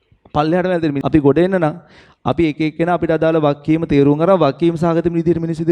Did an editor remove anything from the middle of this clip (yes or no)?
yes